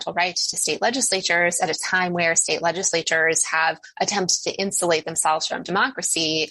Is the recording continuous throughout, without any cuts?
yes; 0 cuts

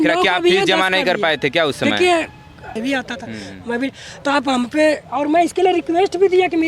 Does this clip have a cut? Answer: yes; 1 cut; at 2.8 s

